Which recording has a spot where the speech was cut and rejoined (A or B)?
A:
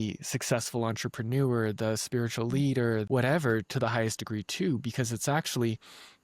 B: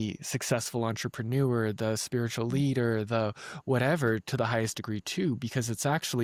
A